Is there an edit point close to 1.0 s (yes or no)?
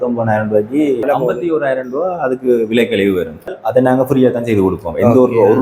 yes